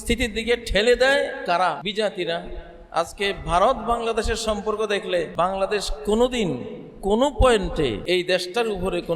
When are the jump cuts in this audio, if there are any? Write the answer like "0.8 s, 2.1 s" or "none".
1.8 s, 5.3 s, 8.0 s